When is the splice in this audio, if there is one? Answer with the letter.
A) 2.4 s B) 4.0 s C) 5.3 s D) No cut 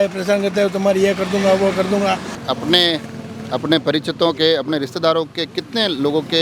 A